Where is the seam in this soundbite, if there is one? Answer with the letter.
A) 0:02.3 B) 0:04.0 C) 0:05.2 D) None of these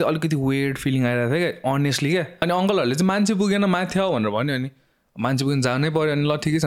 A